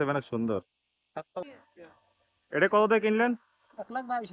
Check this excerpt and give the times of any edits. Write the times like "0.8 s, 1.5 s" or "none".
1.4 s

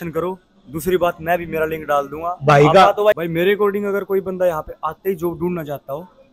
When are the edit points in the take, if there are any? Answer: 3.2 s

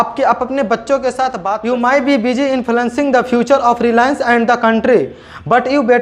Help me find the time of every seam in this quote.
1.5 s

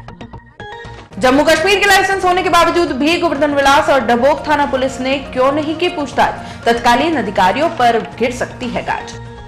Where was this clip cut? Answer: 0.9 s

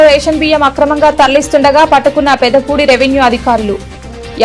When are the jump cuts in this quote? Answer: none

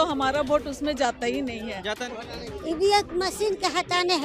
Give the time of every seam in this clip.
2.1 s

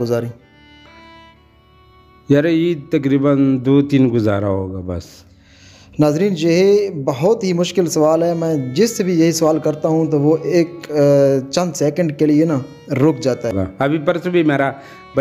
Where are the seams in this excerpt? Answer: 13.6 s

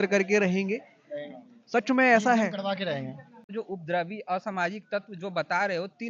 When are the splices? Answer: 3.5 s

